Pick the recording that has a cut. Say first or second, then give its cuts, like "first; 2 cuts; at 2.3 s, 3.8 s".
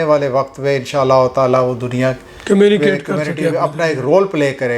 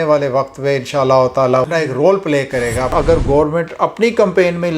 second; 2 cuts; at 1.7 s, 2.9 s